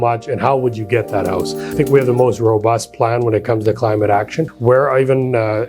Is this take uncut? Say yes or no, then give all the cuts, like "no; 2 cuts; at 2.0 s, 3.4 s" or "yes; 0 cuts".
no; 2 cuts; at 1.8 s, 4.5 s